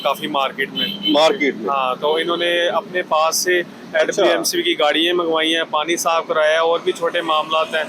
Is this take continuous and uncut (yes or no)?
yes